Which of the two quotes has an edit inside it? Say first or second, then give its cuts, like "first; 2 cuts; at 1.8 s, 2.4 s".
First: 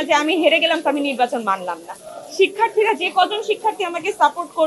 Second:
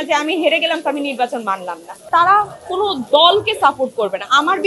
second; 1 cut; at 2.0 s